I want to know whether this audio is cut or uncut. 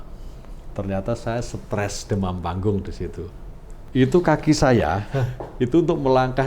cut